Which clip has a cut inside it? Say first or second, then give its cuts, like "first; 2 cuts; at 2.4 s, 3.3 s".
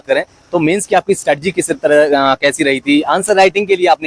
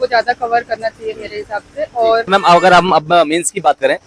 second; 1 cut; at 2.3 s